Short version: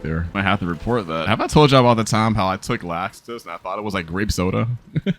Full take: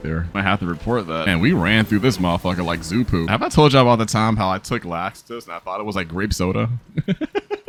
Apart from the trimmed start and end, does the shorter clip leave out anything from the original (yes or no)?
yes